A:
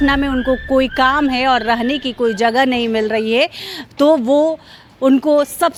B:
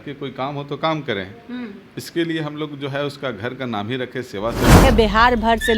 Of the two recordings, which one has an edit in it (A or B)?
B